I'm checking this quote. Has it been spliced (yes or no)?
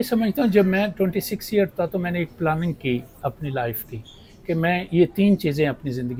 no